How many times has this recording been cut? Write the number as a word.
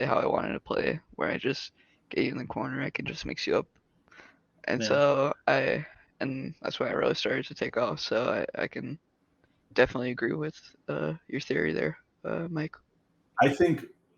one